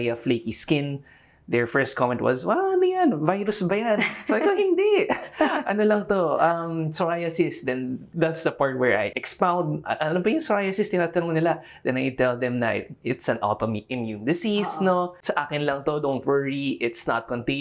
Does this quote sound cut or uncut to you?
cut